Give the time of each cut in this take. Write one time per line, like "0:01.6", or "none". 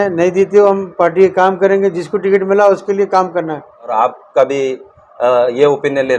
0:03.9